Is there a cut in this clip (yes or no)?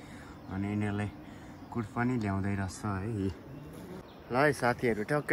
yes